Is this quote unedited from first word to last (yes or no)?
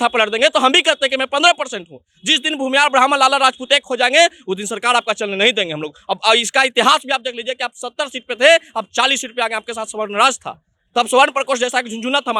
yes